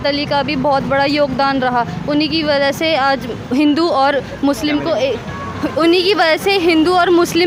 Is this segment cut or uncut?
uncut